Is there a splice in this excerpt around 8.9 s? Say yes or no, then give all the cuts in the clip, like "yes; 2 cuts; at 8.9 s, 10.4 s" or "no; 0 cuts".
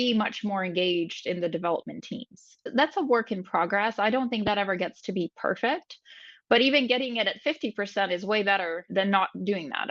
yes; 1 cut; at 8.9 s